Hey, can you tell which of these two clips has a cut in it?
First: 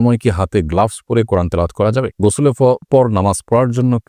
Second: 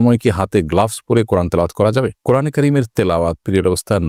first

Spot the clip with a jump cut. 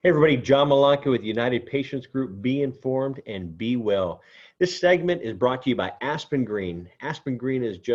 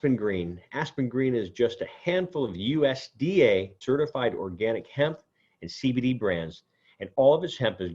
second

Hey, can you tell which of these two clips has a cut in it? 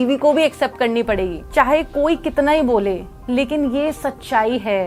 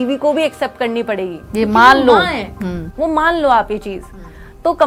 first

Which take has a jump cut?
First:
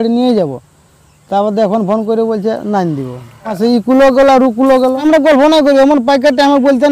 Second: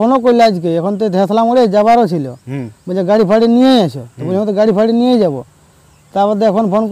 first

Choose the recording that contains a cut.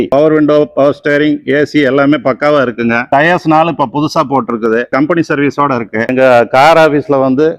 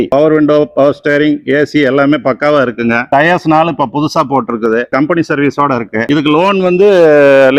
first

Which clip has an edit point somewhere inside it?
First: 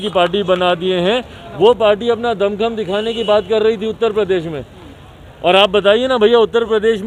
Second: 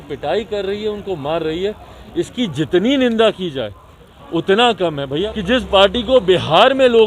second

